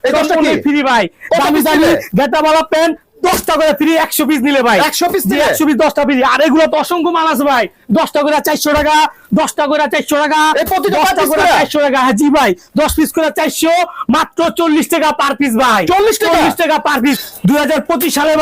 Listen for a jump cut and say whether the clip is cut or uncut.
uncut